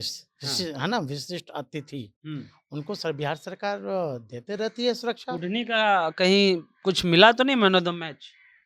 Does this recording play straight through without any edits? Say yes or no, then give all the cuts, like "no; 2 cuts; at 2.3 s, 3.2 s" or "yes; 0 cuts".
yes; 0 cuts